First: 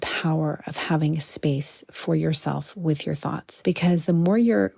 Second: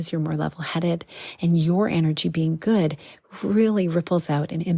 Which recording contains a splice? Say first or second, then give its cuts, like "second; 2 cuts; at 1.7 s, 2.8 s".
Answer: first; 1 cut; at 3.5 s